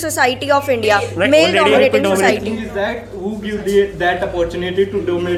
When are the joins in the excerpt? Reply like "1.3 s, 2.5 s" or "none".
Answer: none